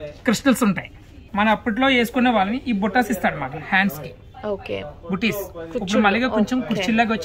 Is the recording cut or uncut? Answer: cut